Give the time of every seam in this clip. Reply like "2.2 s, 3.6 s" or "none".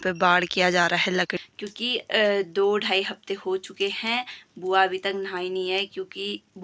1.3 s

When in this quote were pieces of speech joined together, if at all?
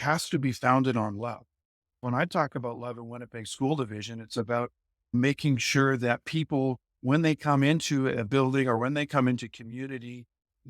2.0 s

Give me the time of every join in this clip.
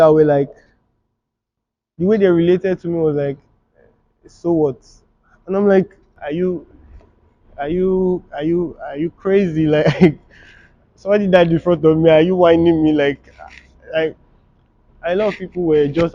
6.1 s

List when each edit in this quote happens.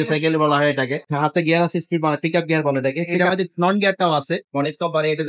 1.1 s, 4.5 s

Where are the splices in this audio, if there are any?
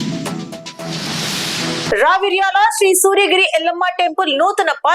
1.9 s

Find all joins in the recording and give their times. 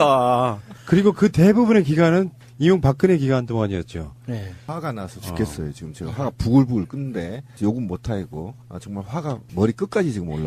none

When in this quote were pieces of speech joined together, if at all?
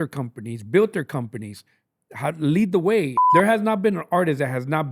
3.2 s

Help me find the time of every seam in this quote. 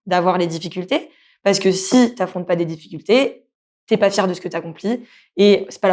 none

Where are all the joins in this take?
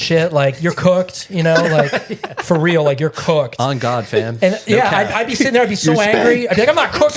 none

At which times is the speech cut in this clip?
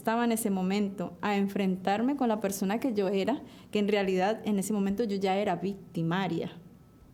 none

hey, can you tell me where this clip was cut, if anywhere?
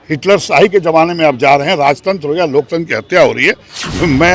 none

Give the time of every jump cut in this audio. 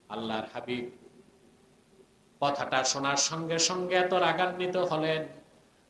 none

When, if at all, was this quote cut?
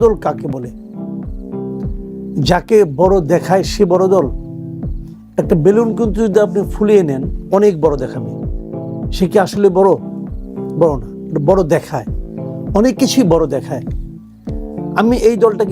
0.9 s, 2.3 s

